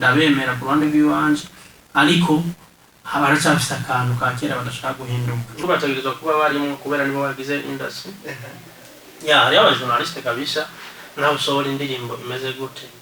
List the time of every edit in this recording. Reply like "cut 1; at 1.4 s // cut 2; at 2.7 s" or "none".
cut 1; at 5.6 s